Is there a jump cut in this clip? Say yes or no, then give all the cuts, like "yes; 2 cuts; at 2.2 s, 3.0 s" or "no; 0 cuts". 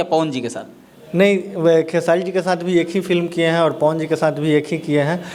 no; 0 cuts